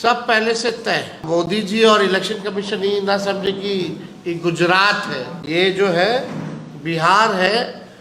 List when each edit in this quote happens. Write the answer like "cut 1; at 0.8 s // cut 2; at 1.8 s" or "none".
cut 1; at 1.2 s // cut 2; at 5.3 s